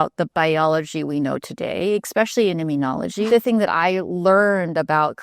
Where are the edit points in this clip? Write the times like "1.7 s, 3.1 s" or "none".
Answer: 3.3 s